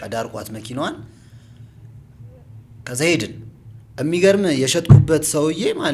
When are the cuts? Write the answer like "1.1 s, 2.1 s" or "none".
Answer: none